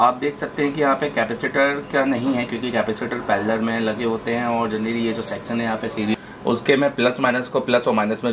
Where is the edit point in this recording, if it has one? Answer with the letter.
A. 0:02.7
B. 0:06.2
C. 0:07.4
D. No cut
B